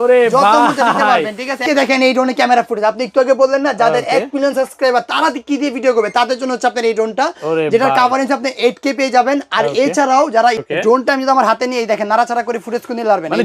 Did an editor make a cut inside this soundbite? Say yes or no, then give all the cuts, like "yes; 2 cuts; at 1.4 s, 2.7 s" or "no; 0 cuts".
yes; 2 cuts; at 1.6 s, 10.6 s